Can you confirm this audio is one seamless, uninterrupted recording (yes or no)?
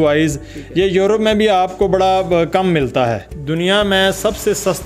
no